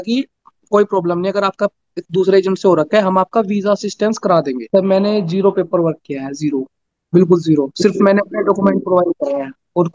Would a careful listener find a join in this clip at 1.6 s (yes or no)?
no